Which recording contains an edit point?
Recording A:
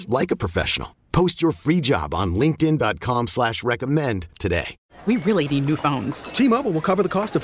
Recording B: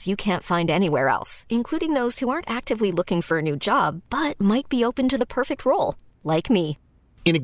A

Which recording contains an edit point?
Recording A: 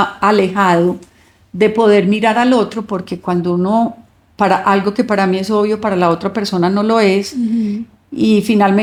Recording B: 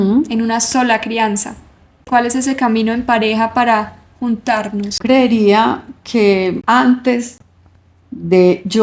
B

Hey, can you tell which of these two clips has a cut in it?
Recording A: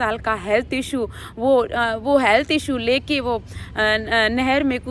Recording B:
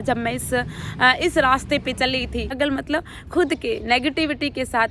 B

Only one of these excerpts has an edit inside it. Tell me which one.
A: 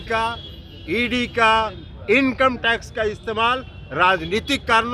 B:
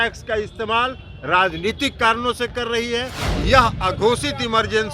B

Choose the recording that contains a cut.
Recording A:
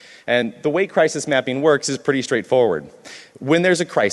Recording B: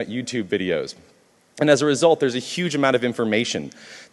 A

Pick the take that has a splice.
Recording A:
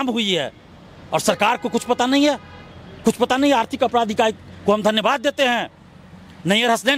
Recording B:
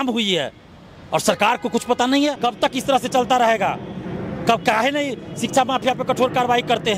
B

